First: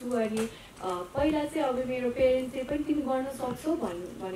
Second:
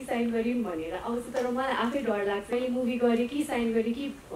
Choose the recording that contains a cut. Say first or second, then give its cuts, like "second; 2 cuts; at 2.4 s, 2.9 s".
second; 1 cut; at 2.5 s